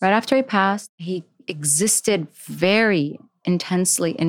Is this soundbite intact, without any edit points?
no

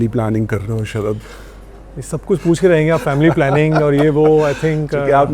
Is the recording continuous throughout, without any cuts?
yes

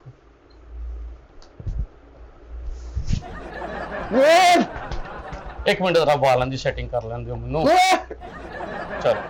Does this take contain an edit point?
no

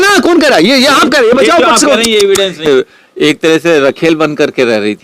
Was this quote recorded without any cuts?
no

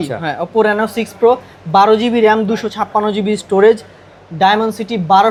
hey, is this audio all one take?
yes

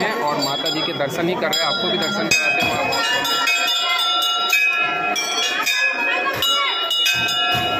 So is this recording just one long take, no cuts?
yes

